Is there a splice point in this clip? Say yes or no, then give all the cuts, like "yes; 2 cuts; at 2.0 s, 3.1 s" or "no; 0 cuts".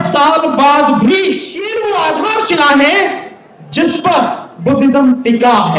yes; 1 cut; at 1.6 s